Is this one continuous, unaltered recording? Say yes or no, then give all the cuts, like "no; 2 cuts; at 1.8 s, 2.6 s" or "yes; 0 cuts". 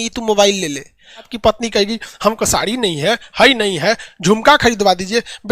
no; 1 cut; at 1.3 s